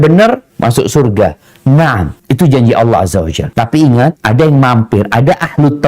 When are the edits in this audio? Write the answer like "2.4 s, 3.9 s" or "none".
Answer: 2.1 s, 3.4 s, 4.2 s